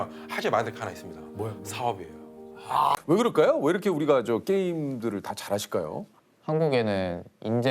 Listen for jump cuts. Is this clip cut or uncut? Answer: cut